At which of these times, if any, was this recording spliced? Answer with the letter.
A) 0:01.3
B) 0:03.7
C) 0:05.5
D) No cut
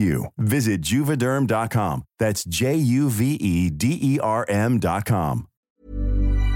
C